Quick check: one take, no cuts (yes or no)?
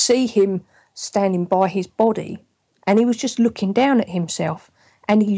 yes